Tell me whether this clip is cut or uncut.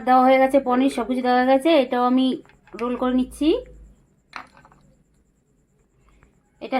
uncut